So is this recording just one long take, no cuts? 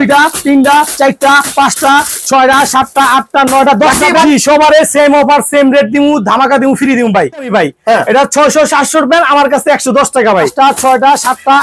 no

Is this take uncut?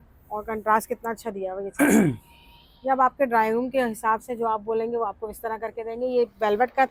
yes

